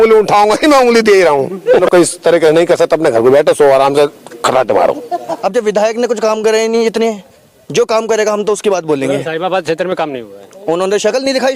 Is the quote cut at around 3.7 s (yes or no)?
no